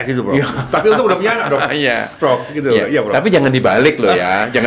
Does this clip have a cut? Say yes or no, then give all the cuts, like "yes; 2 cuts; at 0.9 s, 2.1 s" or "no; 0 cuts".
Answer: no; 0 cuts